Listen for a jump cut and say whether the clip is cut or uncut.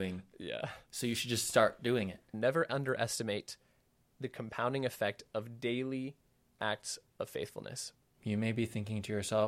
cut